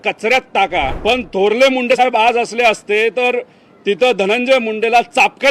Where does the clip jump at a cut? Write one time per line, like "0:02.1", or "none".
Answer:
0:01.0